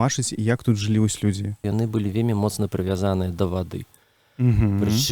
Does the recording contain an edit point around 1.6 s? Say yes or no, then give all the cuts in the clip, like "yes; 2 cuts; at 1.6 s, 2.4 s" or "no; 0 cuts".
yes; 1 cut; at 1.6 s